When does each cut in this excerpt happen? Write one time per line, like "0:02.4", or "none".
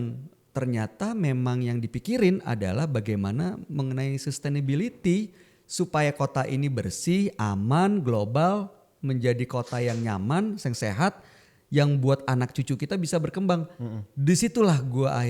none